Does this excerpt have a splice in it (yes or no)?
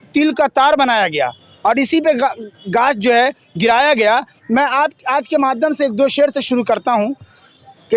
no